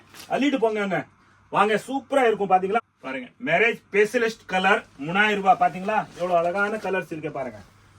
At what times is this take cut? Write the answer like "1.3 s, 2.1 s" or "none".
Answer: 2.8 s